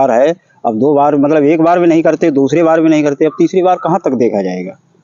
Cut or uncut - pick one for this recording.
uncut